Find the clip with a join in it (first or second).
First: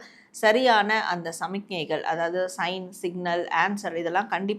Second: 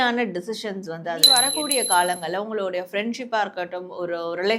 second